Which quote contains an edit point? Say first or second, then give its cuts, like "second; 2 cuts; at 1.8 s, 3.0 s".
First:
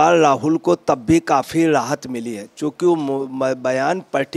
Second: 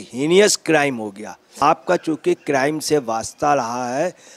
second; 1 cut; at 1.4 s